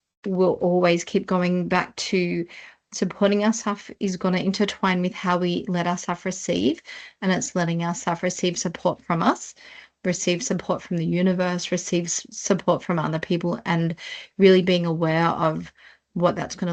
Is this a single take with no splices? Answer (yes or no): yes